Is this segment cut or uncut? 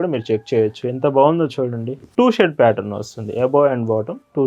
cut